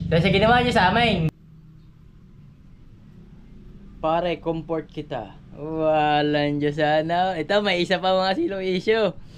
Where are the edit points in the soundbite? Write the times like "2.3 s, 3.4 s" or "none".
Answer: 1.4 s

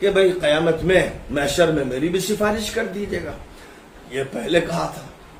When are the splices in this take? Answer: none

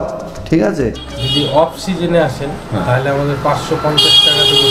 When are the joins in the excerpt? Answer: 1.1 s

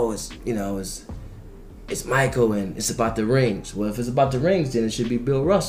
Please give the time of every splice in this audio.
none

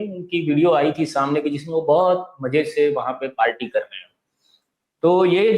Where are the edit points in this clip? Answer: none

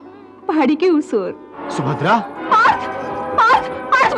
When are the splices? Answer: 1.4 s, 2.4 s

